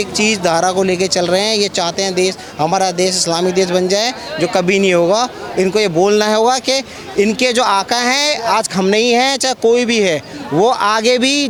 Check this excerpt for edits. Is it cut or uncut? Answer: uncut